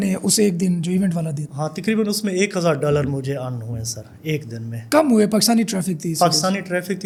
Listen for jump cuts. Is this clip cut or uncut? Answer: uncut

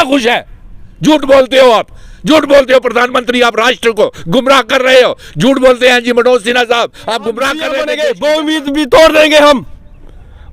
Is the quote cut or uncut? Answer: cut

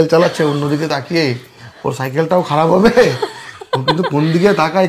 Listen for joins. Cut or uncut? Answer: uncut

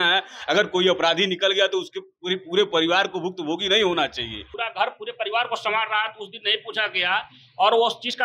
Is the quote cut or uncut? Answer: cut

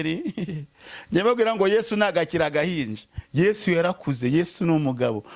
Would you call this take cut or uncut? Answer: uncut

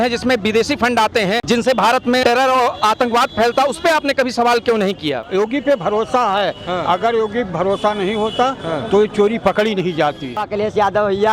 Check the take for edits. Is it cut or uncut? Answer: cut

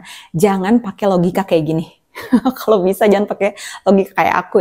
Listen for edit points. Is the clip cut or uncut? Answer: uncut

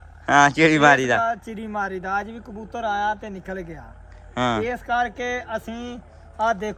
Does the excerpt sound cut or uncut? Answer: uncut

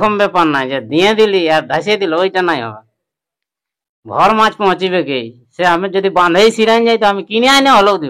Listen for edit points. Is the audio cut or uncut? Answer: uncut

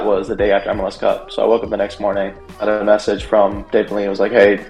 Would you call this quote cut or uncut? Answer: uncut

